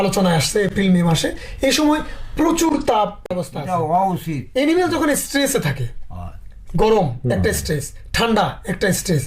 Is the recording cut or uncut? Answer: cut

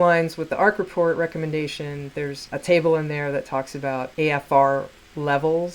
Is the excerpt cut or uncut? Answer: cut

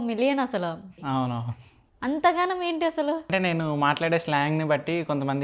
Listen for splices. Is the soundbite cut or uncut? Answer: cut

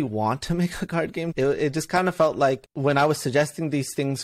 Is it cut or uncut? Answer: cut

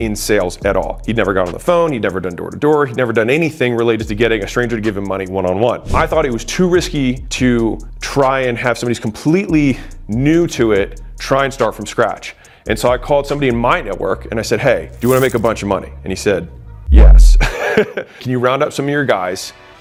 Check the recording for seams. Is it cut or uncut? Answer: uncut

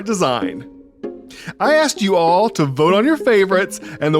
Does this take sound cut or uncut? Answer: cut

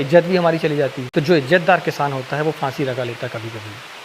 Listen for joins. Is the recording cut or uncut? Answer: cut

